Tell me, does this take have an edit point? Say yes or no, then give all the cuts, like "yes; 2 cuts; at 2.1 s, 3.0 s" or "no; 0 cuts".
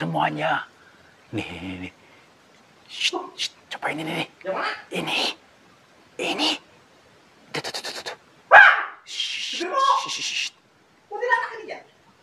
no; 0 cuts